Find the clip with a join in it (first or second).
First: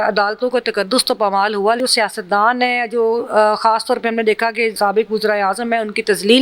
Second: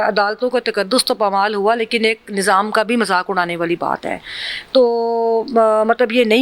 first